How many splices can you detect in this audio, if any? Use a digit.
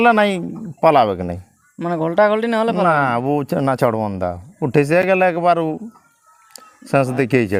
0